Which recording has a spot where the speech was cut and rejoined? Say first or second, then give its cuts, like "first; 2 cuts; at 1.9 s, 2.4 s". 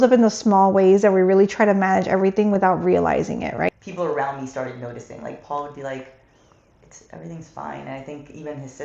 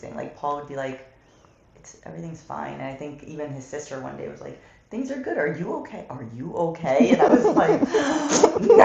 first; 1 cut; at 3.7 s